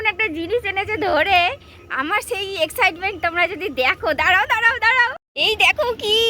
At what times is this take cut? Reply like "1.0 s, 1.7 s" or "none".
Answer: 5.3 s